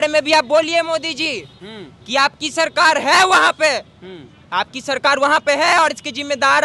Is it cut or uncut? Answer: uncut